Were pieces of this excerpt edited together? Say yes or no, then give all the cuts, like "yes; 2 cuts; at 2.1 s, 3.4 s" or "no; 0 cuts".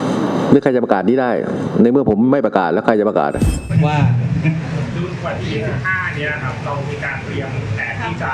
yes; 1 cut; at 3.7 s